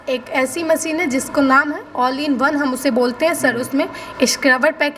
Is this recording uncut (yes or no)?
yes